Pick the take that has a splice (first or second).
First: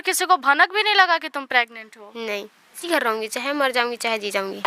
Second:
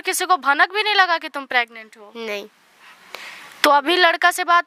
first